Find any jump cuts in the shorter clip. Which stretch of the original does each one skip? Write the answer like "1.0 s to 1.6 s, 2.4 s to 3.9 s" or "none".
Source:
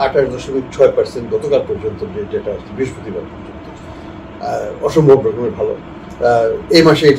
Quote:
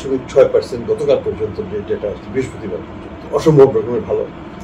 3.7 s to 4.8 s